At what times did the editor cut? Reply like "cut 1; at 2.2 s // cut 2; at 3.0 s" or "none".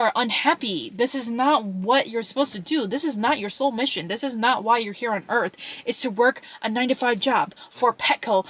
none